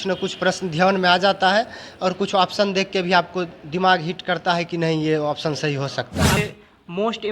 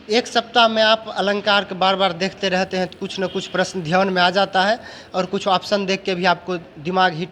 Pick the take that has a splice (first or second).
first